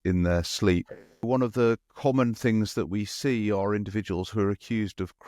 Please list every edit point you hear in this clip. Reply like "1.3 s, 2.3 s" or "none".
1.2 s